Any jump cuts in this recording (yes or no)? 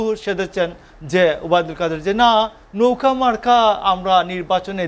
no